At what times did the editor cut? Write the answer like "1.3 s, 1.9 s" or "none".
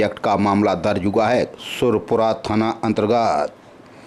1.5 s

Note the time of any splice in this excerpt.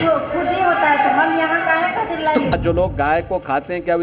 2.5 s

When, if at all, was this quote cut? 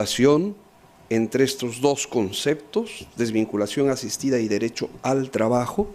2.2 s

